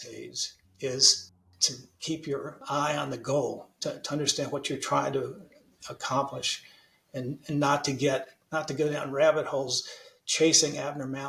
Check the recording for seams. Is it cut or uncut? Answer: cut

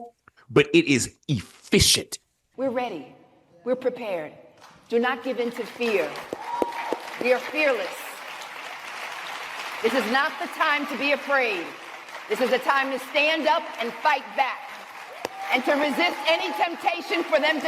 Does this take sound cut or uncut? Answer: cut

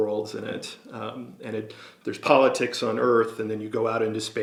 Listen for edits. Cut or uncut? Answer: uncut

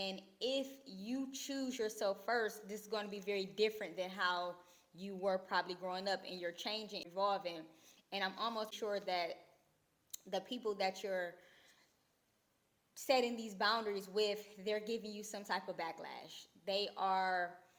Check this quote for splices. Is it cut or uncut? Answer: cut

